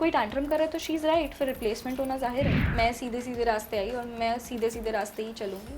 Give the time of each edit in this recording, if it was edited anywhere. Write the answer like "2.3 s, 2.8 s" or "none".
2.6 s

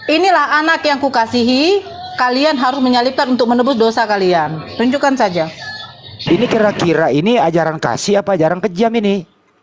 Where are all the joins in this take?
6.2 s

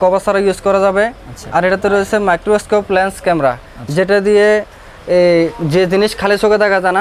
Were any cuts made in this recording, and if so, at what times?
none

